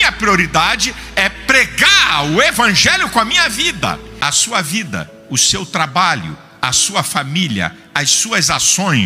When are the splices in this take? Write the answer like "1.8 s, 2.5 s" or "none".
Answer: 4.1 s